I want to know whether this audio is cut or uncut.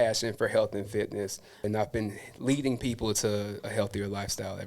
cut